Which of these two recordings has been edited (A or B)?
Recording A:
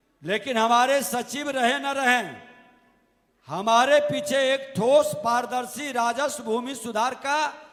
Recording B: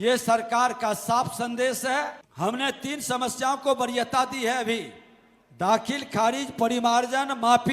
B